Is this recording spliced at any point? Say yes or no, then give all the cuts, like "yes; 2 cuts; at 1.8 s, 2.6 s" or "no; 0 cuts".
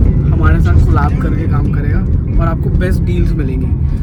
no; 0 cuts